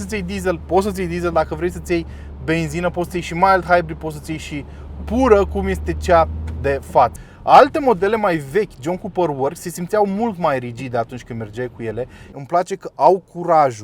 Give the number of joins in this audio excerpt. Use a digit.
2